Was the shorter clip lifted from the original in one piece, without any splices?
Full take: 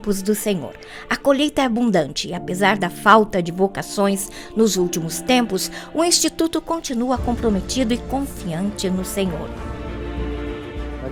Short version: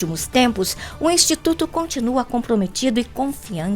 yes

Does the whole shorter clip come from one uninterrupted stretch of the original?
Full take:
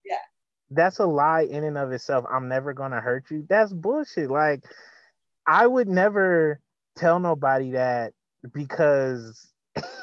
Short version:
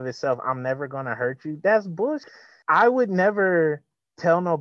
no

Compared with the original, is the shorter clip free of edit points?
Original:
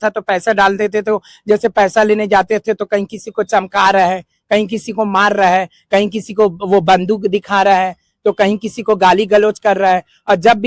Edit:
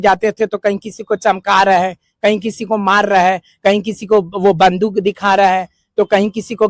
yes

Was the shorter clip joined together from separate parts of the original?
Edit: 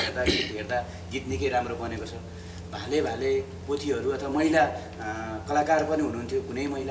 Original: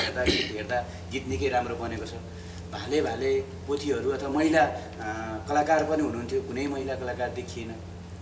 no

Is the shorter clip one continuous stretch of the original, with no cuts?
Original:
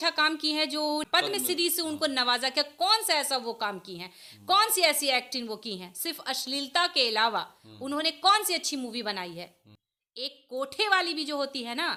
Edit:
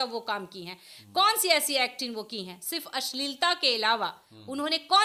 yes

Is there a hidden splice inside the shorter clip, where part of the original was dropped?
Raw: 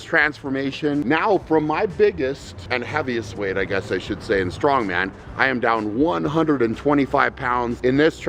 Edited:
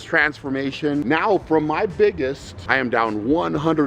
yes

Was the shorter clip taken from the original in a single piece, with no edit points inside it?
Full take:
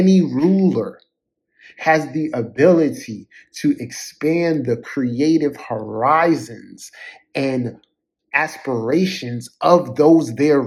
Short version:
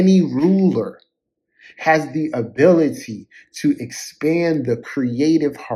yes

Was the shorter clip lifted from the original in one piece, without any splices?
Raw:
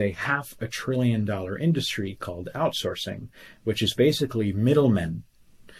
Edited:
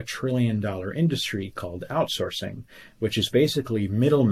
yes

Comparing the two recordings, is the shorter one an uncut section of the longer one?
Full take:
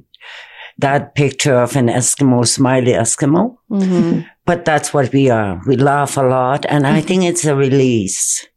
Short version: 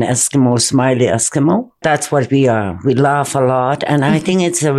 no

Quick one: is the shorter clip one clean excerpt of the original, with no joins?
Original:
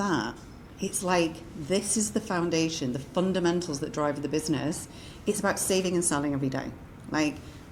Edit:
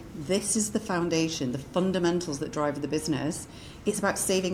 yes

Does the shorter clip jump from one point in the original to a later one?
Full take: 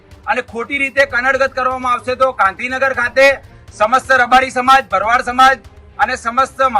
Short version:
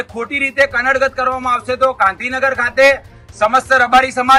no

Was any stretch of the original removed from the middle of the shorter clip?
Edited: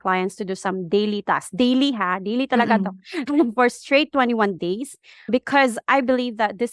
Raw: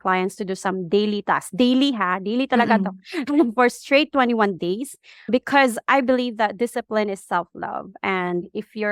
no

